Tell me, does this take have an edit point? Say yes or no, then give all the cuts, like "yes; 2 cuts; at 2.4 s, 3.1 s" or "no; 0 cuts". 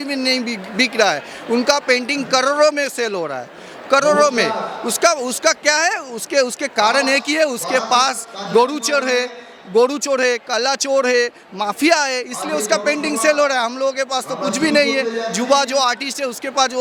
no; 0 cuts